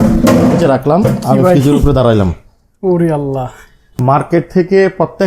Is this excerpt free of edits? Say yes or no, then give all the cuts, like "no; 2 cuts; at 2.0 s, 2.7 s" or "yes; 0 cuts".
no; 1 cut; at 3.9 s